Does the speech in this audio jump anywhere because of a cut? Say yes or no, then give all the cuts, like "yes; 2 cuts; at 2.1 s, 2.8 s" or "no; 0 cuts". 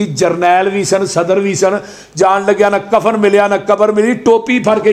no; 0 cuts